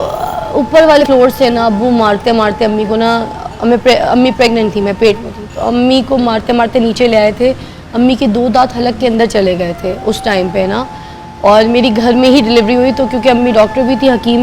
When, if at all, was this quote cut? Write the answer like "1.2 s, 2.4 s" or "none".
1.0 s